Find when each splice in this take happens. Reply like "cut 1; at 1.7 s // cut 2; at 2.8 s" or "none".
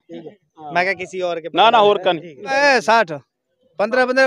cut 1; at 2.4 s